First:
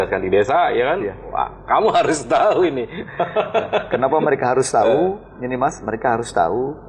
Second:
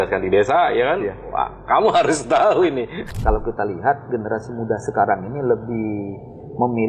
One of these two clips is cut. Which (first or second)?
second